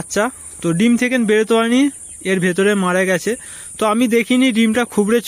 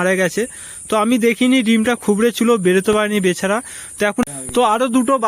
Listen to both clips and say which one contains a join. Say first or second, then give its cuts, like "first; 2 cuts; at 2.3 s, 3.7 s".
second; 1 cut; at 4.2 s